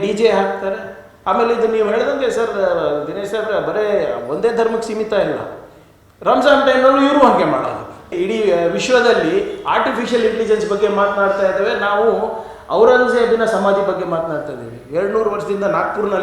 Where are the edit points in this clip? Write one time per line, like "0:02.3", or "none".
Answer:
0:08.1